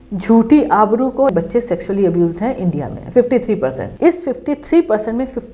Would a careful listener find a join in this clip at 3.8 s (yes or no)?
yes